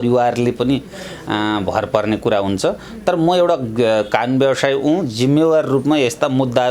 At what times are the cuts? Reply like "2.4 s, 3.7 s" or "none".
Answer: none

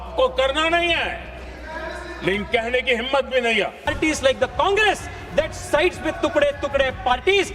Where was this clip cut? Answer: 3.9 s

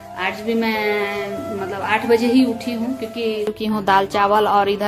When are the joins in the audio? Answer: 3.5 s

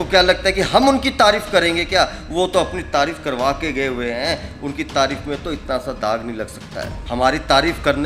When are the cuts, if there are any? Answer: 7.0 s

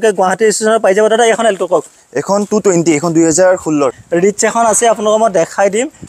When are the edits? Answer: 4.0 s

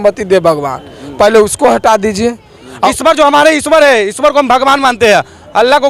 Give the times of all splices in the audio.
2.8 s

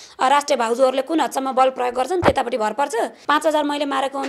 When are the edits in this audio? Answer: 3.2 s

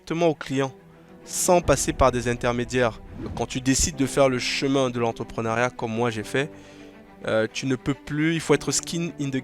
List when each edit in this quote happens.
3.3 s

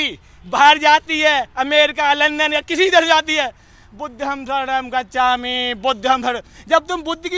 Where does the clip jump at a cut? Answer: none

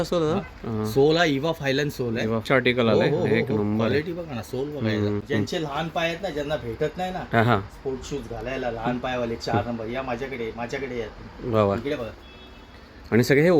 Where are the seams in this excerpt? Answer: 2.6 s, 5.2 s

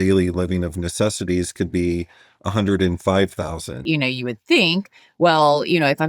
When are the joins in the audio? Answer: 3.8 s

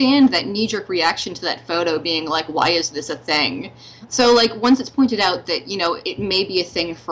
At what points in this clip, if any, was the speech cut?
4.2 s, 6.1 s

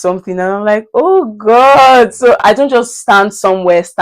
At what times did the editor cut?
2.4 s

